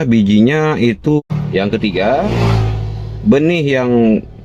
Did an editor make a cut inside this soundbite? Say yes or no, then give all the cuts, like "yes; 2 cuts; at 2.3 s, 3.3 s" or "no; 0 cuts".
yes; 1 cut; at 1.2 s